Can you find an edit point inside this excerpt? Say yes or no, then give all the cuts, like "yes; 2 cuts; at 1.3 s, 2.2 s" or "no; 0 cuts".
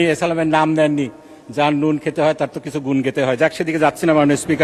no; 0 cuts